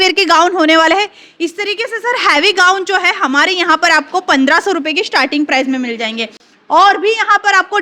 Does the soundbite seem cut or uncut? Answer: uncut